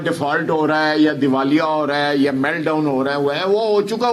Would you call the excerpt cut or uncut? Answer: uncut